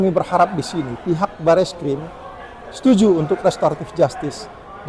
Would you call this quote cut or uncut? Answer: uncut